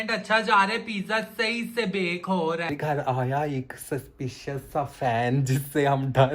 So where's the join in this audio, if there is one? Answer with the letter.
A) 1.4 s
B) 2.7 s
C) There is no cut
B